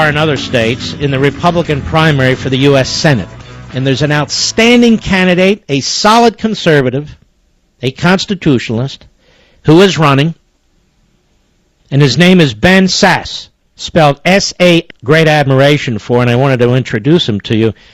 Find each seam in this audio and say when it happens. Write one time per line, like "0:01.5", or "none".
none